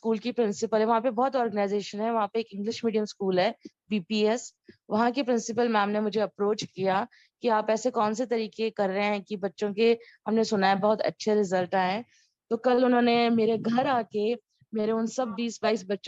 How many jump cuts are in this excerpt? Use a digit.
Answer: 0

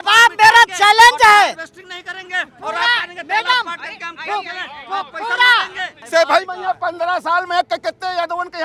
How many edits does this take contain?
1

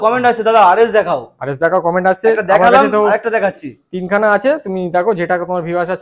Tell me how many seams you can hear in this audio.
0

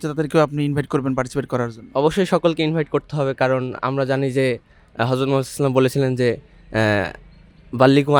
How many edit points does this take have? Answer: 0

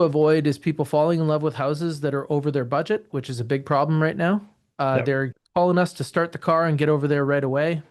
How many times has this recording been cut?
0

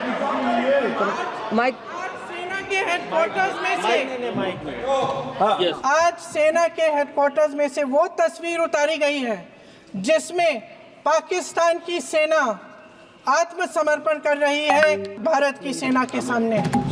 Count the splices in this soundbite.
2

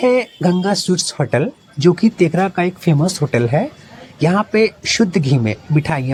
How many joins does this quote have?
0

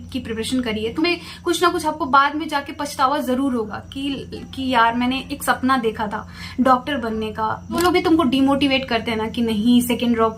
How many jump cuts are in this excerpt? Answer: 2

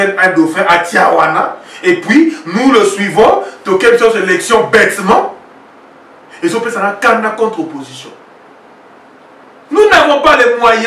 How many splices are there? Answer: 0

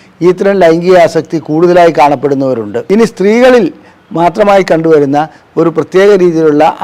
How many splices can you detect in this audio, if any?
1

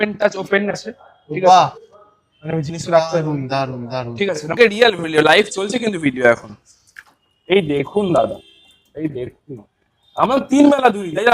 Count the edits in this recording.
1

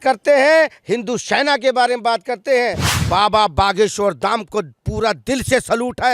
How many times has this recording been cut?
1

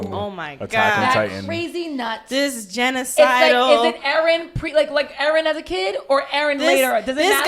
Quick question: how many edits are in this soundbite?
0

